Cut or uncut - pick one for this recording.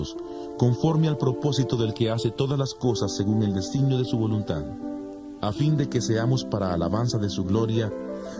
cut